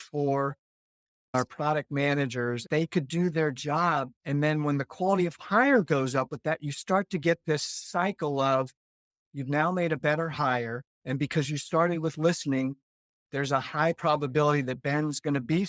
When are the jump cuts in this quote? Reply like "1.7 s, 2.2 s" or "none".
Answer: 1.3 s, 2.6 s, 4.1 s

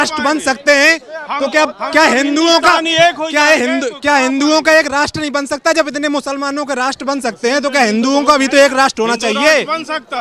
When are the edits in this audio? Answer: none

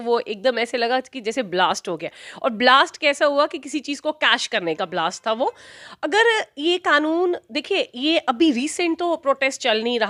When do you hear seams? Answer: none

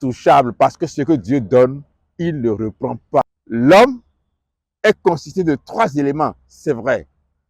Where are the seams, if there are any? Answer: 3.2 s

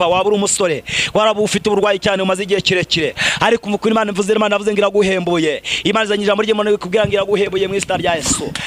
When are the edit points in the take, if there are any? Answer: none

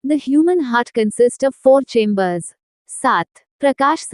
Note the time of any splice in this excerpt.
3.0 s

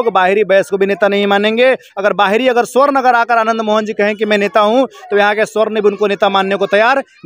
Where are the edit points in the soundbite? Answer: none

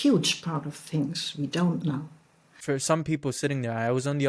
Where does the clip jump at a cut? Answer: 2.5 s

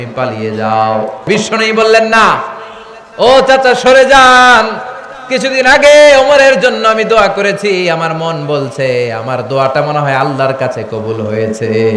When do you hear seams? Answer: 1.3 s

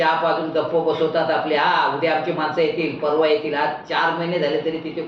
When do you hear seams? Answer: none

